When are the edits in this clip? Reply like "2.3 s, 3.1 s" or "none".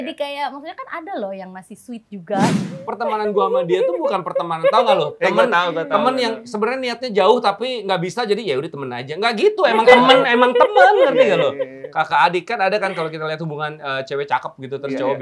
2.7 s